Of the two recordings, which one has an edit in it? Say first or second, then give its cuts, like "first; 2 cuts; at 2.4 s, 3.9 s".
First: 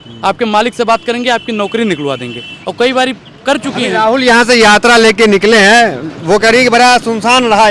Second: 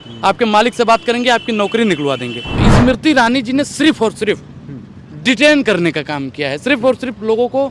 second; 1 cut; at 2.6 s